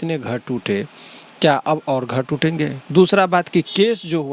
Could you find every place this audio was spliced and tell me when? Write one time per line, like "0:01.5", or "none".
0:02.8